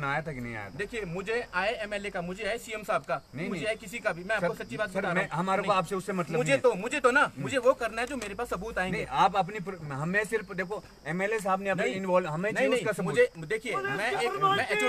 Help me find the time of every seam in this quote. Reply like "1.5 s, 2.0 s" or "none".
none